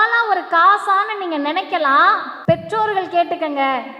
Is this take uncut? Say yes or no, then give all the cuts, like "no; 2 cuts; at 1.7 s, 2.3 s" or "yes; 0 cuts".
no; 1 cut; at 2.3 s